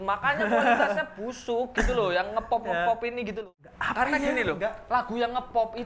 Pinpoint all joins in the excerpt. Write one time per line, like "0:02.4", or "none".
0:03.4